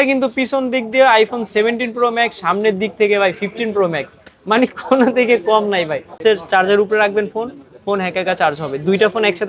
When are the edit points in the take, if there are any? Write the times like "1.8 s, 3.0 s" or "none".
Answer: 6.2 s